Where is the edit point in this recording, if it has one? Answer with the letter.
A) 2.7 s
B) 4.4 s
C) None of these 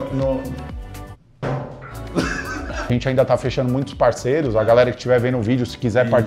A